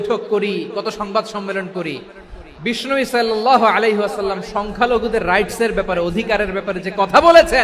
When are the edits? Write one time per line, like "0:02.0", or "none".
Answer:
none

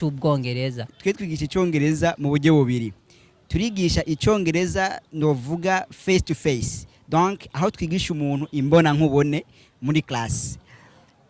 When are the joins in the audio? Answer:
0:00.9

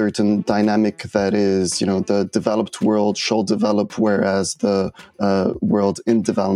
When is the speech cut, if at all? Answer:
none

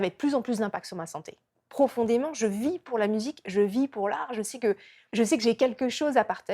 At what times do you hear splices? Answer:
0:01.4

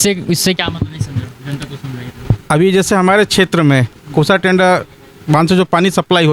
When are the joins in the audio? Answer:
none

